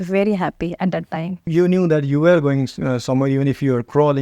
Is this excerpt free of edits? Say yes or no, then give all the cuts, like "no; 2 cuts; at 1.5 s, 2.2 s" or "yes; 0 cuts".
no; 1 cut; at 1.5 s